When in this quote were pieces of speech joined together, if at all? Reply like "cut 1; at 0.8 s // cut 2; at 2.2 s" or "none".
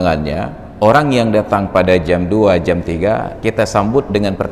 none